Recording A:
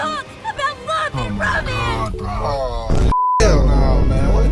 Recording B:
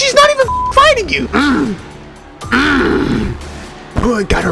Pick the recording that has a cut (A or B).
B